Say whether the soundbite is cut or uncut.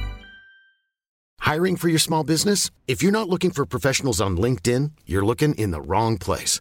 cut